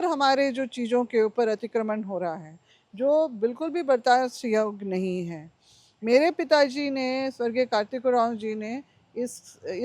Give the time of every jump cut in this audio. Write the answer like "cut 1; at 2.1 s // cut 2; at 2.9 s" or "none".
none